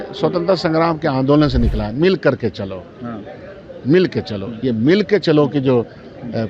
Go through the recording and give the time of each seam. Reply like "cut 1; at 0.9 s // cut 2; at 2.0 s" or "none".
none